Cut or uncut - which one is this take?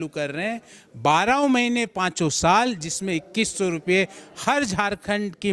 uncut